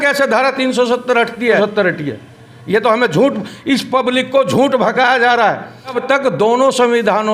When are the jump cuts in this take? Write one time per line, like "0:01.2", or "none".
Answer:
0:01.6
0:06.0